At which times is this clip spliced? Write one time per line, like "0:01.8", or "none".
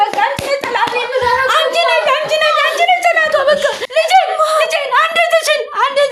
none